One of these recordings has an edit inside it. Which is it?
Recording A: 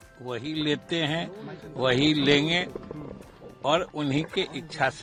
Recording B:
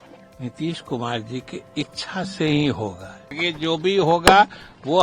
B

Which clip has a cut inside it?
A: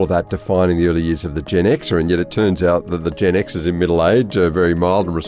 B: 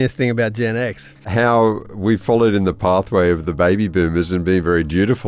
B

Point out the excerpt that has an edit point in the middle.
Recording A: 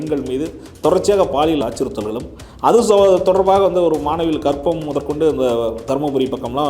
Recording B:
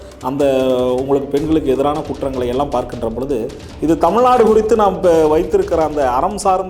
A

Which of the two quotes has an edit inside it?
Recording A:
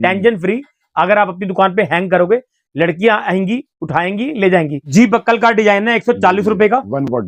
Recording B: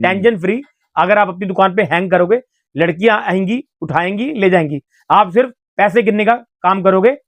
A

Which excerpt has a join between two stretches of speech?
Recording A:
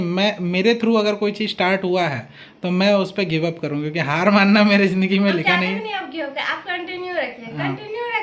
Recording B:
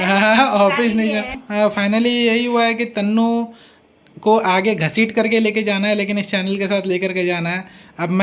B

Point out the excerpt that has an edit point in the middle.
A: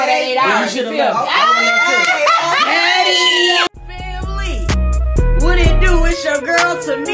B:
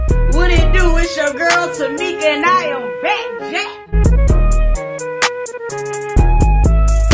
A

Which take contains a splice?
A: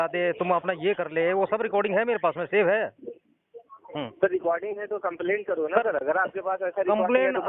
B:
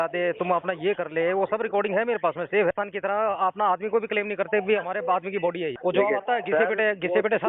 B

